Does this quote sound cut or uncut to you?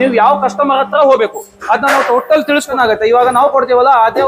cut